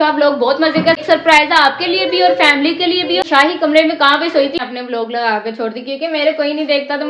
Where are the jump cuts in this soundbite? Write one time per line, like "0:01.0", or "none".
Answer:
0:01.0
0:03.3
0:04.6

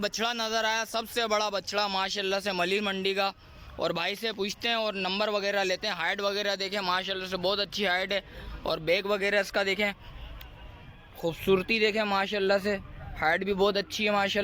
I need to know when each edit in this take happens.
none

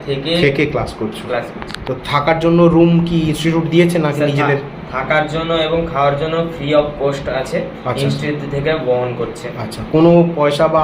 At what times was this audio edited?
none

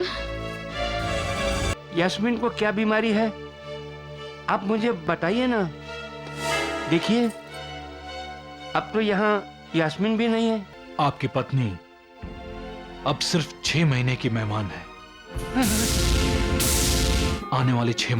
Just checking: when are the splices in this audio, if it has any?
0:01.7
0:10.8
0:17.4

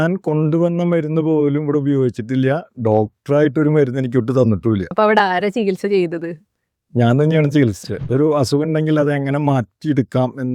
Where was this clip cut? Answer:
0:04.9
0:07.9

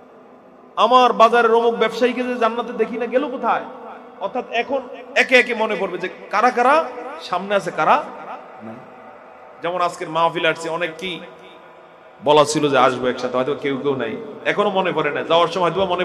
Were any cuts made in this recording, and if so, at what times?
none

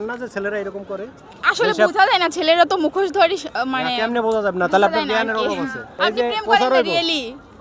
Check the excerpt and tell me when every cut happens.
0:05.8

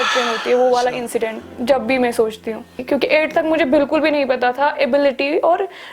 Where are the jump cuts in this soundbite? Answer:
0:02.7

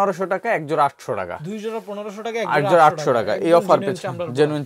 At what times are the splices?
none

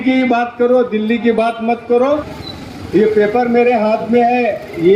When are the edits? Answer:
0:02.3

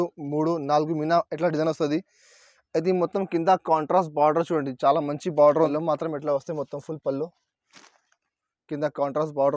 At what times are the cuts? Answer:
0:05.7

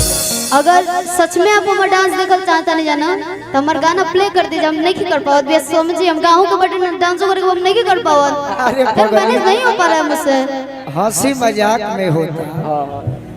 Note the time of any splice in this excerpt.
none

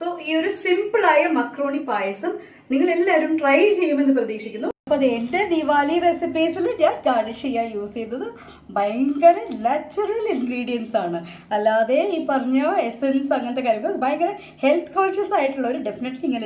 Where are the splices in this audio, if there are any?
0:04.8

